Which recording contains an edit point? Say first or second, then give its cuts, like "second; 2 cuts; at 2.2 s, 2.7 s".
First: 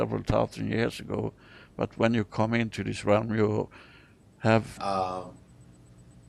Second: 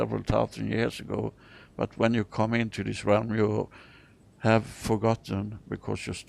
second; 1 cut; at 4.8 s